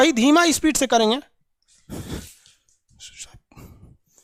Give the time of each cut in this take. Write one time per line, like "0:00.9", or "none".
none